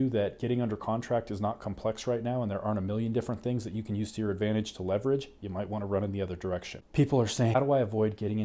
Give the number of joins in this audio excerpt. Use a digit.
2